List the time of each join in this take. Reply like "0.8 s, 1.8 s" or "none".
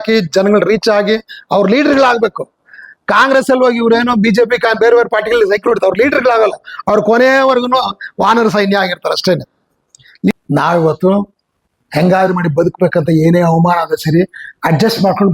10.3 s